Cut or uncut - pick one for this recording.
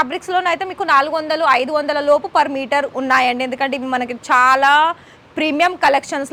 uncut